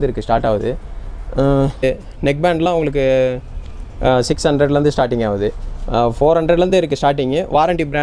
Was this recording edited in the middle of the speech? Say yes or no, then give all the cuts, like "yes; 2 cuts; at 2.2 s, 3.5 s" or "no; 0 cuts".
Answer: yes; 1 cut; at 1.8 s